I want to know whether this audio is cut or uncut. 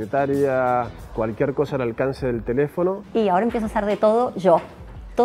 cut